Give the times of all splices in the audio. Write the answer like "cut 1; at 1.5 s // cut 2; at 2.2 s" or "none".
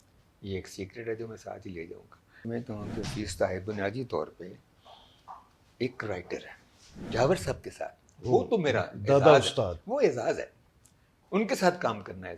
cut 1; at 2.4 s // cut 2; at 7.1 s